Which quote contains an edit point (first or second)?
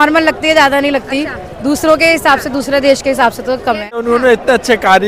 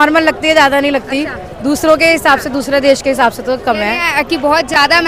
first